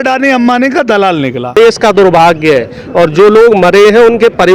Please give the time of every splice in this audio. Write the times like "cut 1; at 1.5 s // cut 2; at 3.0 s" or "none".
cut 1; at 1.5 s